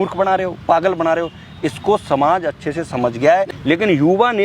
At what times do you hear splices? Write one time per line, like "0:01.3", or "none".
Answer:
0:03.5